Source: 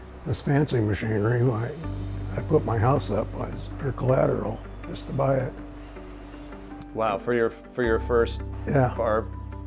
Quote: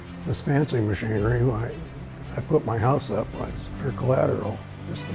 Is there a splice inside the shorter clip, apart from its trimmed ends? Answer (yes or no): no